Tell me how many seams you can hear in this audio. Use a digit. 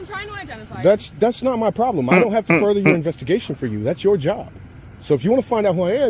1